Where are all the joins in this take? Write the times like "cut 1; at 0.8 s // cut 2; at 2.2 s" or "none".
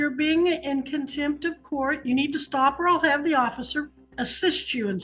cut 1; at 4.0 s